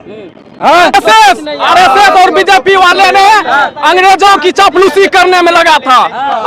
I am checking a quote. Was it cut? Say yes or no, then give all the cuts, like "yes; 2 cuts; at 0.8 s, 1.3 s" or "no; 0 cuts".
yes; 1 cut; at 0.9 s